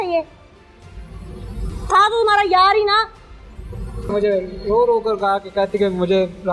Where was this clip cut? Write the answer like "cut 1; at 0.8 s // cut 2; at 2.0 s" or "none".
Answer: cut 1; at 4.1 s